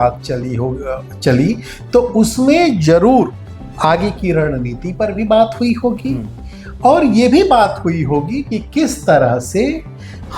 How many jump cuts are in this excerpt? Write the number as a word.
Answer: one